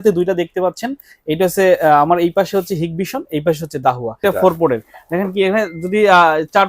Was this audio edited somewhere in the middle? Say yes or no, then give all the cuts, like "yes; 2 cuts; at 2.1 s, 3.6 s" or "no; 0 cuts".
yes; 1 cut; at 4.1 s